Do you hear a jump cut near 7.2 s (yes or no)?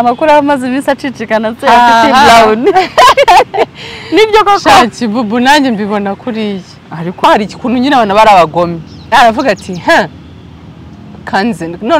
yes